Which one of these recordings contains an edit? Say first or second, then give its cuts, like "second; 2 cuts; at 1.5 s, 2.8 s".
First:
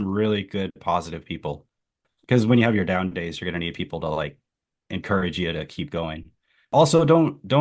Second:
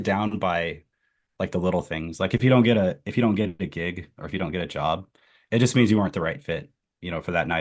first; 2 cuts; at 1.9 s, 6.7 s